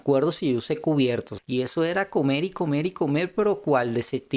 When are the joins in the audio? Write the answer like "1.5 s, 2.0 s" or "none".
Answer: 1.4 s